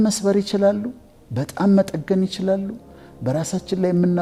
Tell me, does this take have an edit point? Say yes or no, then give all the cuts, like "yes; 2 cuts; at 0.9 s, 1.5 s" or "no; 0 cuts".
no; 0 cuts